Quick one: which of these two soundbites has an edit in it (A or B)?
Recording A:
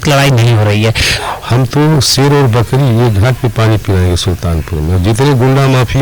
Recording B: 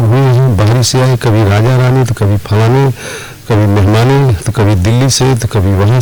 A